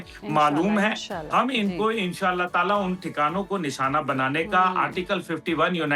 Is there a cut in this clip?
no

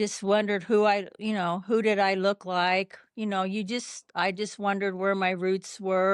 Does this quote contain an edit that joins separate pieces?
no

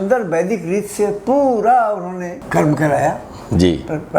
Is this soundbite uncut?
no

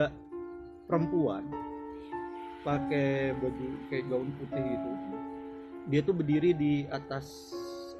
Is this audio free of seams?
yes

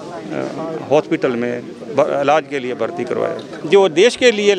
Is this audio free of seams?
no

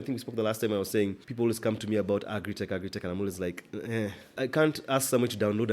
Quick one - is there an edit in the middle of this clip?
yes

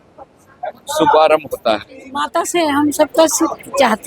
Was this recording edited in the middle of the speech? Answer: yes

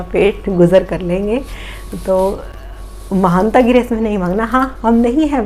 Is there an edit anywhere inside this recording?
no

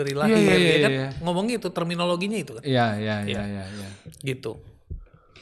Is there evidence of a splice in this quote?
no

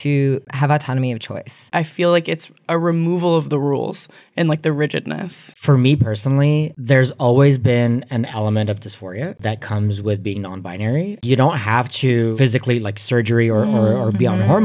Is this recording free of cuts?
no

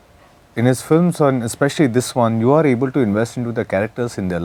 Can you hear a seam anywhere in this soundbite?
no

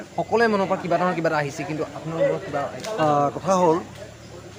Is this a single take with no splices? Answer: yes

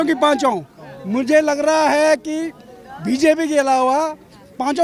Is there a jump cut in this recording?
no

